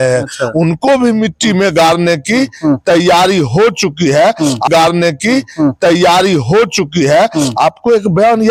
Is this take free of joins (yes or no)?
yes